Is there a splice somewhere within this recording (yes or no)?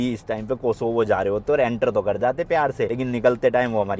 no